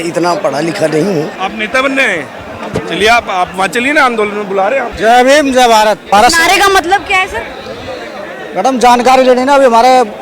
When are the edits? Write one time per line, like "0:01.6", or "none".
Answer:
0:01.3
0:04.9
0:06.0